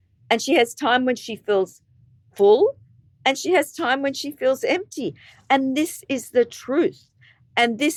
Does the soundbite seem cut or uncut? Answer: uncut